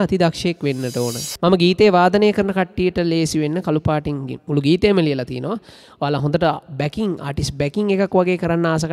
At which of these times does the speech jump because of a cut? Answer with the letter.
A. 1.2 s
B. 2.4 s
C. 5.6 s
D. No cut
A